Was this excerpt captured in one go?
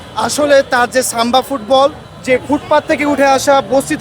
no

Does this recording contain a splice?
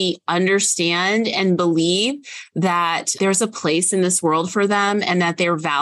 no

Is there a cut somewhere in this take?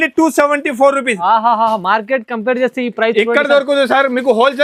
no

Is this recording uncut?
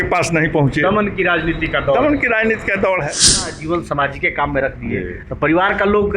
no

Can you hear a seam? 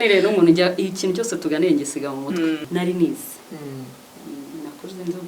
yes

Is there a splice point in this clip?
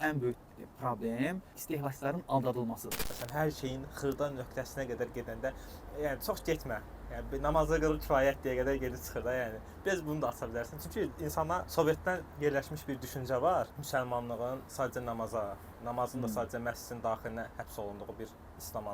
yes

